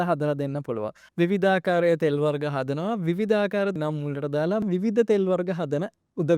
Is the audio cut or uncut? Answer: cut